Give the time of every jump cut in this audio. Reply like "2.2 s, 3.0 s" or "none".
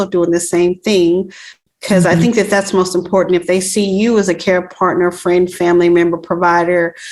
none